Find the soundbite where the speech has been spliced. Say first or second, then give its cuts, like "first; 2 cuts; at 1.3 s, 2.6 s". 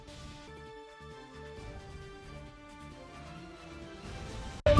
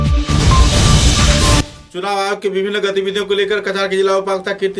second; 1 cut; at 1.6 s